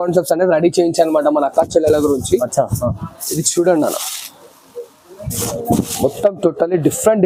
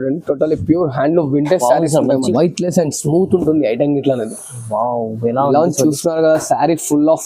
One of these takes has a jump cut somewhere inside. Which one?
second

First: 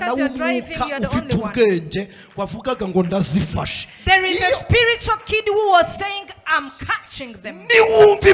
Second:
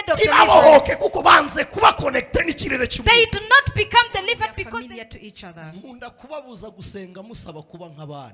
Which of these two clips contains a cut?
second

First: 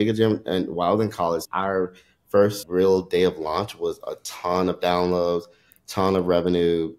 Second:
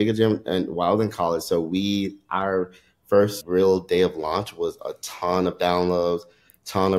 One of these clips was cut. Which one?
first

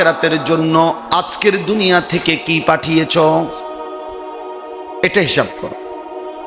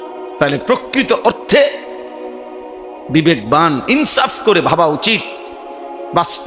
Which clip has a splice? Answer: first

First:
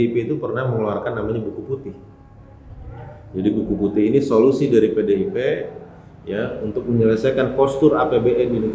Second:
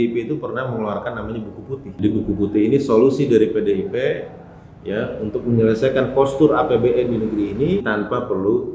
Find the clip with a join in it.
second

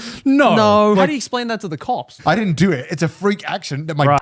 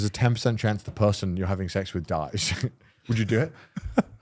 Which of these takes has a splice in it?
first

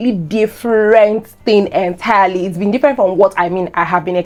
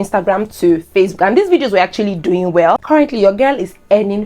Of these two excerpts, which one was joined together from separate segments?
second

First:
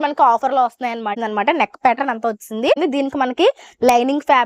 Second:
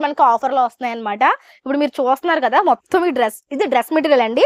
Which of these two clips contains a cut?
first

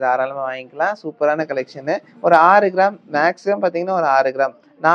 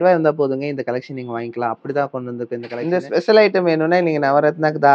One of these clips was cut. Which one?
second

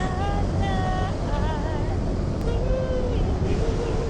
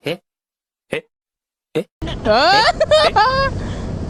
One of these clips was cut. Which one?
first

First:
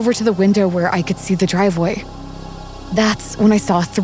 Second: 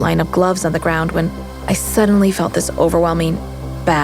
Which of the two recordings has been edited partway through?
second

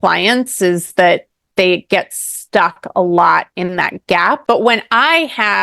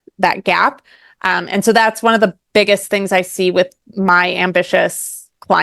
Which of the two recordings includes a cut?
first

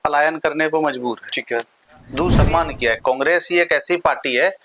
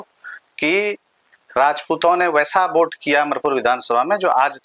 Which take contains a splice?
first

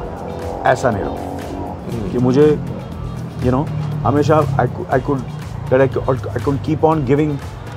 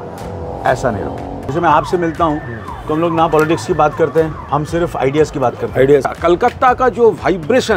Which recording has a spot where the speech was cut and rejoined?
second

